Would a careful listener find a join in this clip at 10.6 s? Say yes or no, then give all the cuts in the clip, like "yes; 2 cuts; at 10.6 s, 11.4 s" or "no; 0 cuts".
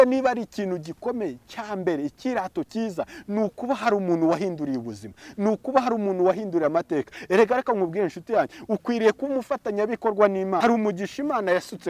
yes; 1 cut; at 10.6 s